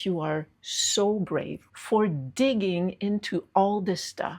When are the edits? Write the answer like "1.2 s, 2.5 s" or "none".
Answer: 1.6 s